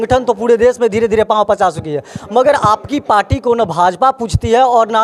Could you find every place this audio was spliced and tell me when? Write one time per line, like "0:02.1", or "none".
none